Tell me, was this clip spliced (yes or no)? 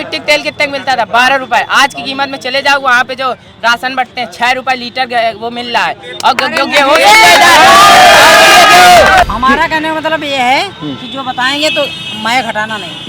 yes